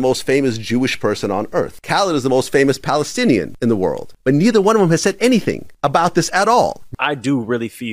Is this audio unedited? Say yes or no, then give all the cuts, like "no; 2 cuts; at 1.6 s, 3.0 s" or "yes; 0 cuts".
no; 1 cut; at 6.9 s